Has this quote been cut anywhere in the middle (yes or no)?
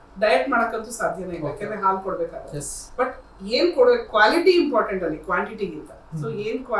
no